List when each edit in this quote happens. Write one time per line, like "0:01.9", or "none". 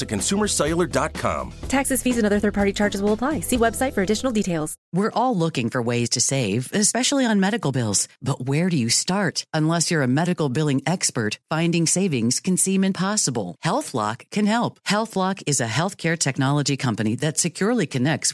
0:04.8